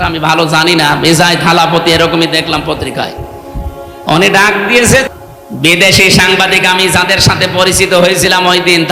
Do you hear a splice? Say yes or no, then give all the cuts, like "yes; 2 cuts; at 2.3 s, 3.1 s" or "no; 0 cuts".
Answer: yes; 1 cut; at 5.1 s